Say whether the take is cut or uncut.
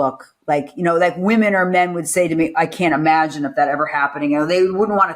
uncut